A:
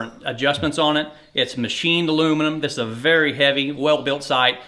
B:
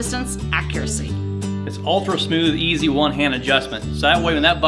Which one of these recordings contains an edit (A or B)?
A